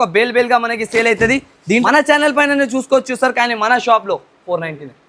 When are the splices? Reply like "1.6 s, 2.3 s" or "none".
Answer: 1.8 s